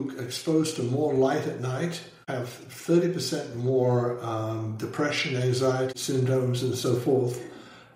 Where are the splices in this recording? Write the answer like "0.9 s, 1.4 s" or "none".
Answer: 2.2 s, 5.9 s